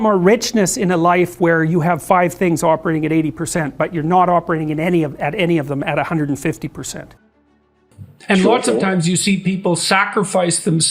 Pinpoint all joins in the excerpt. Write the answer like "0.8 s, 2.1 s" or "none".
7.8 s